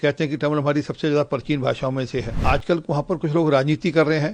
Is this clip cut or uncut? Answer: cut